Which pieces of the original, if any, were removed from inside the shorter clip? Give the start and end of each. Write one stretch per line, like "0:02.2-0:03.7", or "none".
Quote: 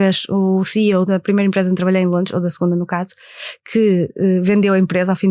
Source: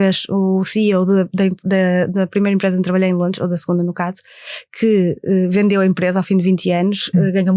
0:01.1-0:02.1